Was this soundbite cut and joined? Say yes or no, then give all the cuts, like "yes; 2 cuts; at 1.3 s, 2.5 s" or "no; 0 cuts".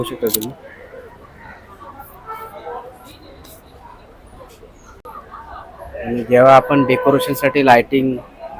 no; 0 cuts